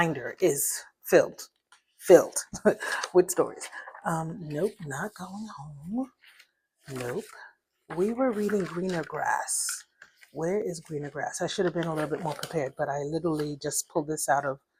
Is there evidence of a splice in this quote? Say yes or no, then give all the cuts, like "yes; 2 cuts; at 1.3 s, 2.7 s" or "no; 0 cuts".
no; 0 cuts